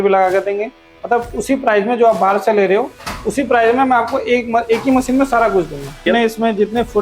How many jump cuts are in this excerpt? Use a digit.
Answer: 1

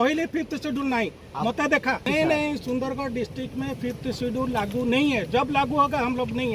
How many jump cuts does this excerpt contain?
1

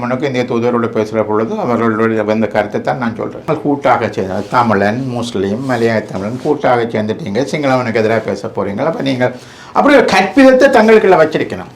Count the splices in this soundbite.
1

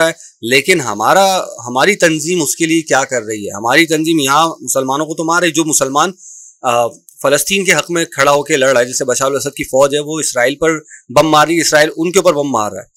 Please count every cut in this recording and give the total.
0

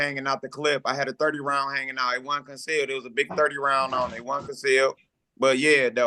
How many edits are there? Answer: 0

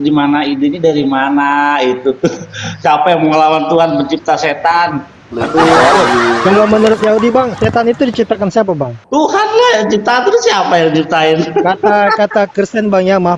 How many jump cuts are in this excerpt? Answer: 1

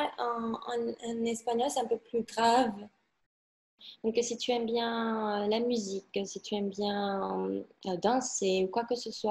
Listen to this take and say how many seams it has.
1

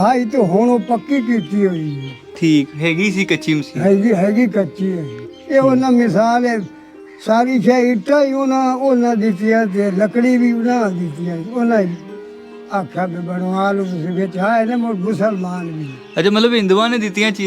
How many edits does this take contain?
0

